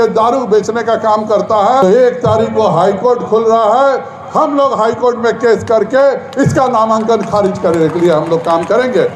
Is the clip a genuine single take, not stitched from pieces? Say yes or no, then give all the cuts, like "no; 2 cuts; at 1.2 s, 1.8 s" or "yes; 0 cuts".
no; 1 cut; at 1.8 s